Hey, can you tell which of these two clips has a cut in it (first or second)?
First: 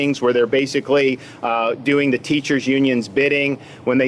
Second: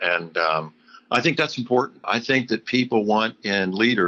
second